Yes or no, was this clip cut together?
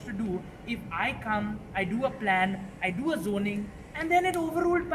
no